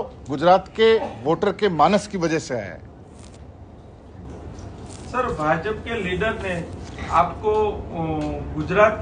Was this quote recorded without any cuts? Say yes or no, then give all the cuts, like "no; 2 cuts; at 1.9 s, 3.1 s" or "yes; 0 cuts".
no; 1 cut; at 4.2 s